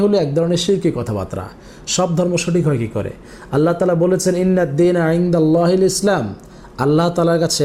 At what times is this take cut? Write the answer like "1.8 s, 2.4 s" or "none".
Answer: none